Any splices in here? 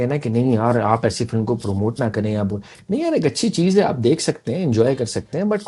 no; 0 cuts

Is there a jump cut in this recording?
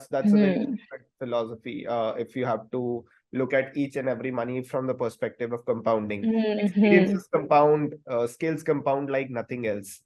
no; 0 cuts

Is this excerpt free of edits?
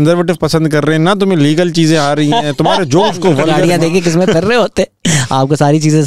no; 1 cut; at 3.5 s

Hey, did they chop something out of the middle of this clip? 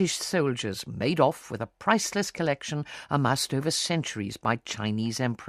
yes; 1 cut; at 1.1 s

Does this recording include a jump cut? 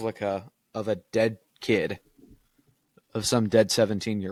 no; 0 cuts

